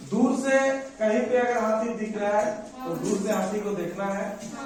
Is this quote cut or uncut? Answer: uncut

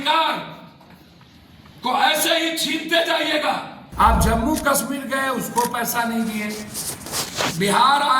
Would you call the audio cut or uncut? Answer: cut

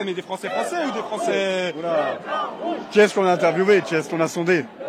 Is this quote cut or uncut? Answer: uncut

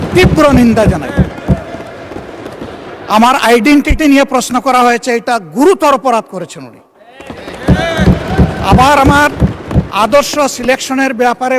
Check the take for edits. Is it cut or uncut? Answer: uncut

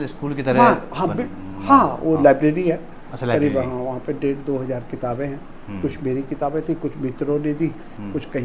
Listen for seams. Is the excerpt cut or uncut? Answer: uncut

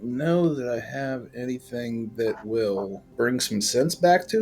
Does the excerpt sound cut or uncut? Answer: cut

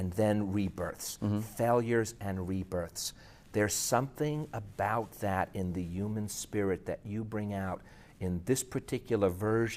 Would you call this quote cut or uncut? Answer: cut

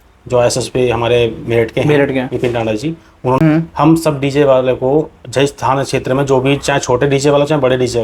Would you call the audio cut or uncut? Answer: cut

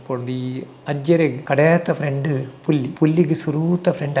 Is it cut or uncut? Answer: cut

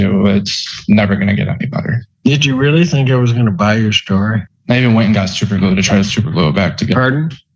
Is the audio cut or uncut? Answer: cut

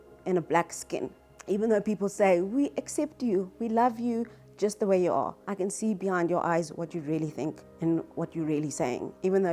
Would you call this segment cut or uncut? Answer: uncut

